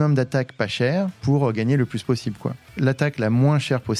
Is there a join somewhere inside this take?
yes; 2 cuts; at 1.2 s, 2.7 s

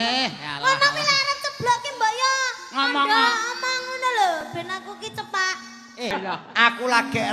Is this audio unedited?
no; 1 cut; at 6.1 s

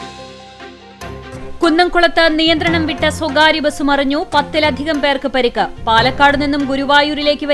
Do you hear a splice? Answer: yes; 1 cut; at 1.4 s

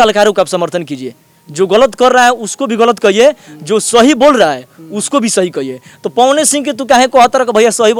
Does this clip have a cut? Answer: no; 0 cuts

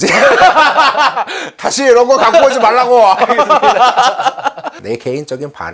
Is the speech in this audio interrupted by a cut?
yes; 1 cut; at 4.7 s

